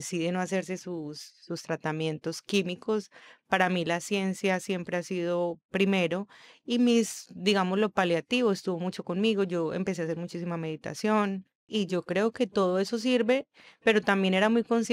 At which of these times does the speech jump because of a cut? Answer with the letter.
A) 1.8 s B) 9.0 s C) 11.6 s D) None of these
C